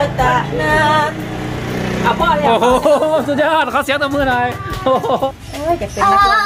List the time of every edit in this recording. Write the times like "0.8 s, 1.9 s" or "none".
5.3 s